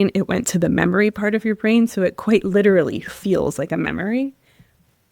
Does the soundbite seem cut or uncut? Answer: uncut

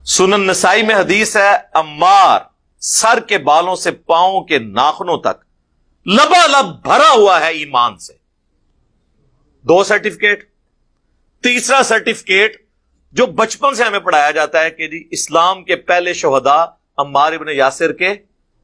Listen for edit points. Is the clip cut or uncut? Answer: uncut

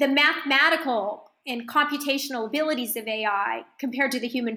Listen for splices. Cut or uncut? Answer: uncut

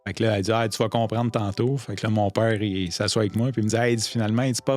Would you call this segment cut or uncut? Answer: uncut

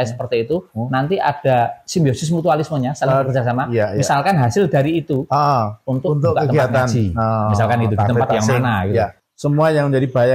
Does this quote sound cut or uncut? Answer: cut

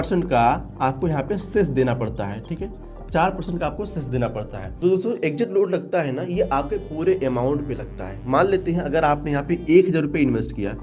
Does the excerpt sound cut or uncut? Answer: cut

